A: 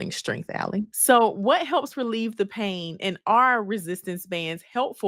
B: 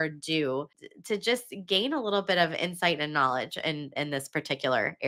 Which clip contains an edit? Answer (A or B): A